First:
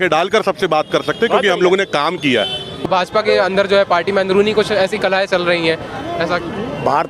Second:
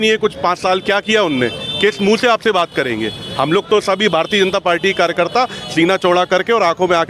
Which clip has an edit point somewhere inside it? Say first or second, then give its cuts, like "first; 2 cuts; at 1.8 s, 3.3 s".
first; 1 cut; at 2.8 s